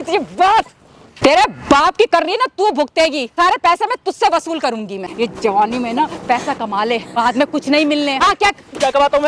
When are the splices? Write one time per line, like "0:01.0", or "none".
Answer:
0:01.2
0:03.3
0:05.1
0:07.2
0:08.2